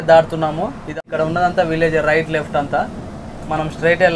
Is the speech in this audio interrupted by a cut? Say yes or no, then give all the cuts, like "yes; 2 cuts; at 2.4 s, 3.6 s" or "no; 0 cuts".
yes; 1 cut; at 0.9 s